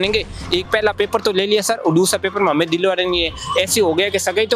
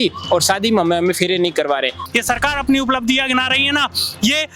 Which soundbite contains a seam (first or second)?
second